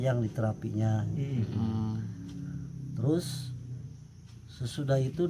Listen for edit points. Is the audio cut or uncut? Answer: uncut